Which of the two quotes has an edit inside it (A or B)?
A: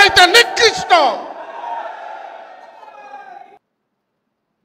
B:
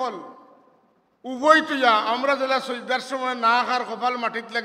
A